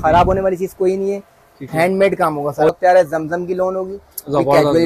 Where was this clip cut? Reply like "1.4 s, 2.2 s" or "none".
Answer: 2.7 s